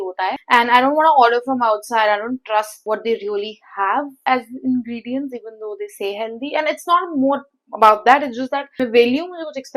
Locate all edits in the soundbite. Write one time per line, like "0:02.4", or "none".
none